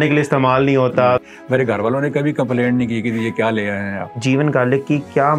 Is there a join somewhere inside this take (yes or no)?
yes